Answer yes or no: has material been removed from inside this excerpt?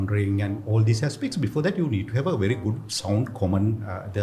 no